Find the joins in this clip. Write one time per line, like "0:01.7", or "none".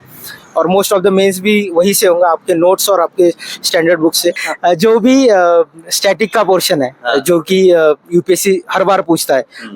0:04.5